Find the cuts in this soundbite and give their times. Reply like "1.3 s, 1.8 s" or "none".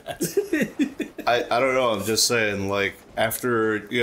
none